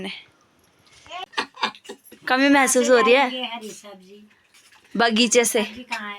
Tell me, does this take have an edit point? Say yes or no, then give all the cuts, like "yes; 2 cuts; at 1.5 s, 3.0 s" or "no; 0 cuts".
yes; 1 cut; at 1.3 s